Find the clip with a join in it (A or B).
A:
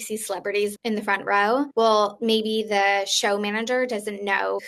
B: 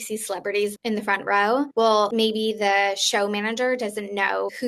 B